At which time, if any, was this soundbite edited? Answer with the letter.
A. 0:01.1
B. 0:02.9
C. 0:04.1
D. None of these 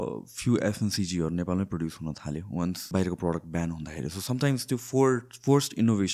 B